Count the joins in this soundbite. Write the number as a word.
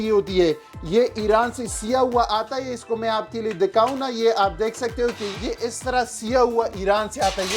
one